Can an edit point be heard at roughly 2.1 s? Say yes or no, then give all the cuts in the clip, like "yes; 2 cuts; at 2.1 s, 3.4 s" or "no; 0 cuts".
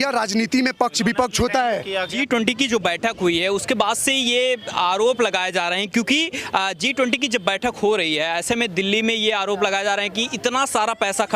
yes; 1 cut; at 2.1 s